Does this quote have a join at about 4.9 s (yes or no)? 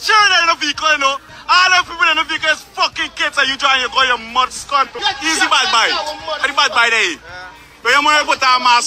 yes